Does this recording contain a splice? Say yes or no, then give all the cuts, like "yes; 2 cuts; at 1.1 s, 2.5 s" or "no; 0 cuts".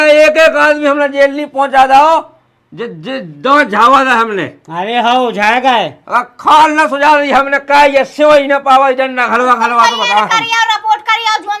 no; 0 cuts